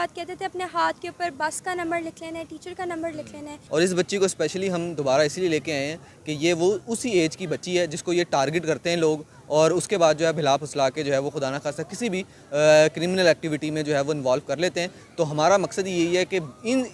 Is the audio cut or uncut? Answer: cut